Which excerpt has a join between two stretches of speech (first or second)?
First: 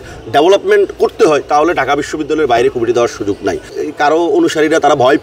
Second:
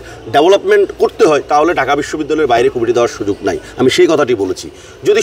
first